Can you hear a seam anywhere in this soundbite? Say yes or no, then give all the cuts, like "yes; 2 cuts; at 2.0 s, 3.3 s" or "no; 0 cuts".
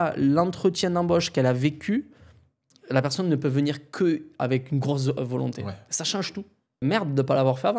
yes; 1 cut; at 6.8 s